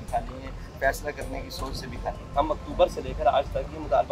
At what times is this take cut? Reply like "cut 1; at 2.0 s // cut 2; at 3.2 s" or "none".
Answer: cut 1; at 2.2 s